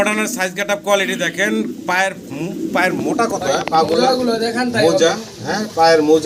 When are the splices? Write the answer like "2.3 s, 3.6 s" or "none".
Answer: none